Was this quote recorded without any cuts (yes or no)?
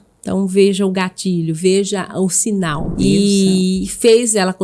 no